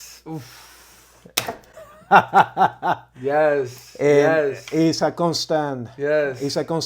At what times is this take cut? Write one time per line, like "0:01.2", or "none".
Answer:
none